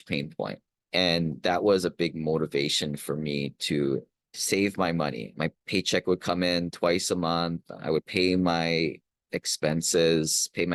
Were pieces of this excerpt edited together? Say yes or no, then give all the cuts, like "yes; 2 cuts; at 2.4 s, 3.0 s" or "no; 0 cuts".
yes; 1 cut; at 5.2 s